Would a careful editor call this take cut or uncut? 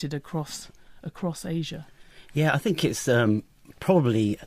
cut